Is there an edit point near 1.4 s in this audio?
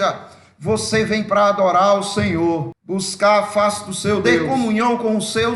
no; 2 cuts; at 2.8 s, 4.4 s

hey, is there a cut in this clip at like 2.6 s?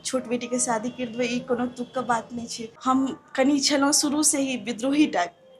yes; 1 cut; at 2.6 s

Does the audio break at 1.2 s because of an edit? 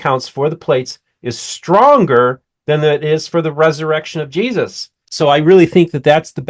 no; 1 cut; at 5.0 s

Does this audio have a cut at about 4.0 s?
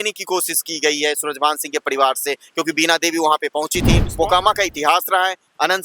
yes; 1 cut; at 4.0 s

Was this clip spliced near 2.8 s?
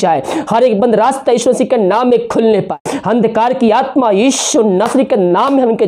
yes; 1 cut; at 2.8 s

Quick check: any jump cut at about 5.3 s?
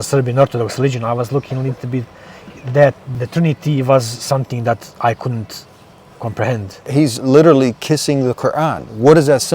no; 2 cuts; at 3.1 s, 6.9 s

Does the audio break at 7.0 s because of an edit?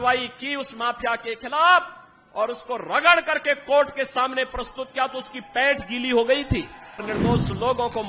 yes; 1 cut; at 7.0 s

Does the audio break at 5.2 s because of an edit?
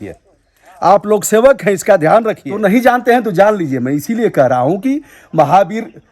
no; 1 cut; at 2.4 s

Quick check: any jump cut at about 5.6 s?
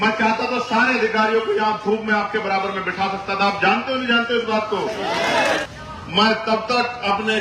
yes; 1 cut; at 5.6 s

